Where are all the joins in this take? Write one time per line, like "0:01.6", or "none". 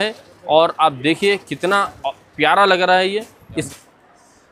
0:03.5